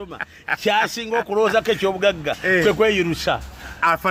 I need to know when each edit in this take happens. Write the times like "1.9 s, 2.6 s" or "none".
none